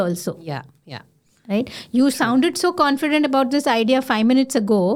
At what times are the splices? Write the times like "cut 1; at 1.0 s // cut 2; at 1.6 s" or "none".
none